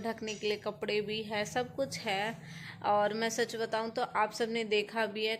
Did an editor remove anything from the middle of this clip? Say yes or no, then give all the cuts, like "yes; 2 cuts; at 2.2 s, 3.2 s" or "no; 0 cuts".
no; 0 cuts